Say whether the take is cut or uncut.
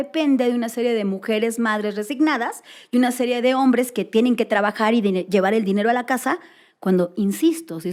uncut